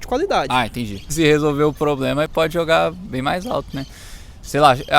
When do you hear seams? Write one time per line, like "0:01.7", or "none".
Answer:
0:01.0